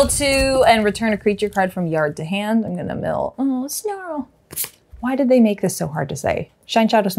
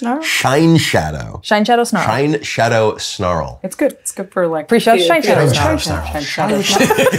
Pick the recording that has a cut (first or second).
second